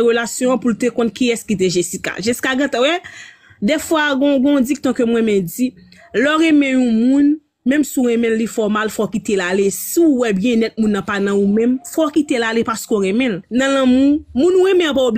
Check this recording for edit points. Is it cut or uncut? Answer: cut